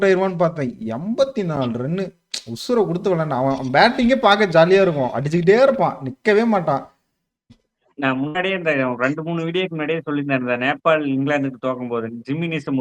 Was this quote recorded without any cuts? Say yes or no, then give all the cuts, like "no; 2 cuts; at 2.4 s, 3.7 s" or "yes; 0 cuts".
no; 1 cut; at 7.6 s